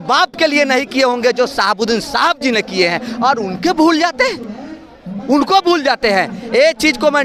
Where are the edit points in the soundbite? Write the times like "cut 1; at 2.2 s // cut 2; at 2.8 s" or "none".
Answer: none